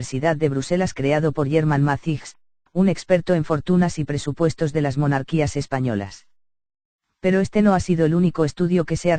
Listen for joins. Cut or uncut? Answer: cut